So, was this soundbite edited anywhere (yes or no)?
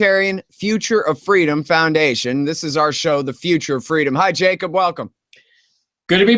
no